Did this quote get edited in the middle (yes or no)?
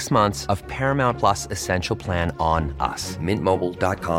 no